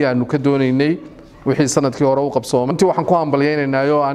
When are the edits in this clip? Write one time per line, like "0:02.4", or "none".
0:02.7